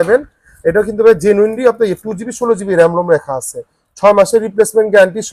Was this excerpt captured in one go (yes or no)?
yes